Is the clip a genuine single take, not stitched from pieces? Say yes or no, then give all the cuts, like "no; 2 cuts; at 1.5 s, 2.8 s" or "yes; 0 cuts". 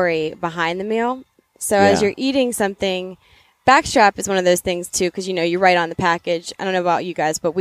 yes; 0 cuts